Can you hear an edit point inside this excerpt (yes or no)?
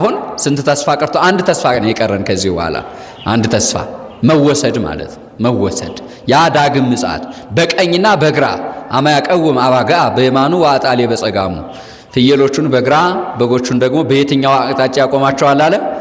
no